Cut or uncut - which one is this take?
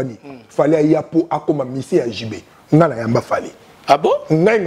uncut